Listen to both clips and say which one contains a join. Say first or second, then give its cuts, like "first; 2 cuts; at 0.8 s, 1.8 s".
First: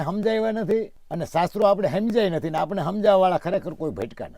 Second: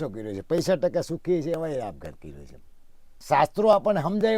second; 1 cut; at 3.1 s